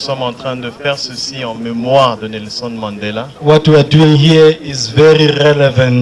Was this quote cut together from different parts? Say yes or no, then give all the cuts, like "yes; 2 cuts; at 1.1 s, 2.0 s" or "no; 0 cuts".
no; 0 cuts